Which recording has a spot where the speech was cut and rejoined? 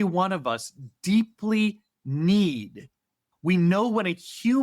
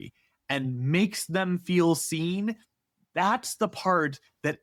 first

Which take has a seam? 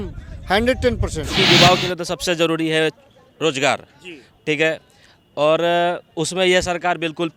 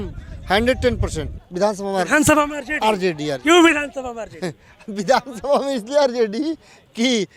first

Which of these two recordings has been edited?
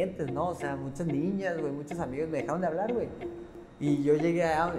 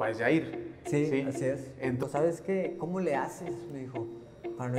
second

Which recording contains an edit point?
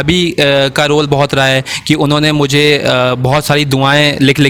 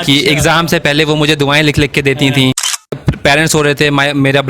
second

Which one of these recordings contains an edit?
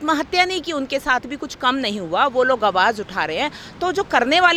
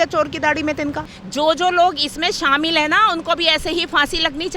second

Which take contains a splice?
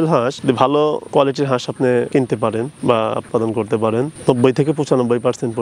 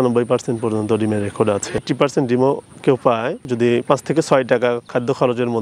second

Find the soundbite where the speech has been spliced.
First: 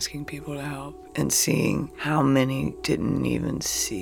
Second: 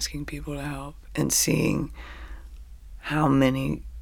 first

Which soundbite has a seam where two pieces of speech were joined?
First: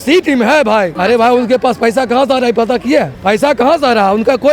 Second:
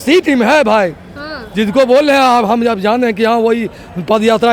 first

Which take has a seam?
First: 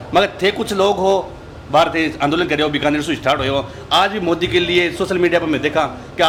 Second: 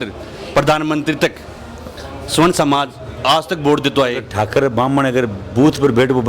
second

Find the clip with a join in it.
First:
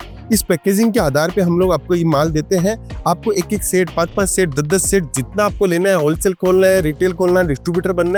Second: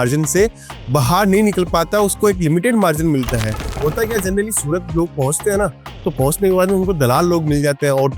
second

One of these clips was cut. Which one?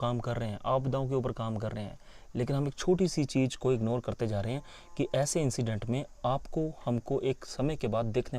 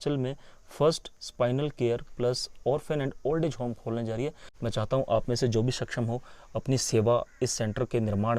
second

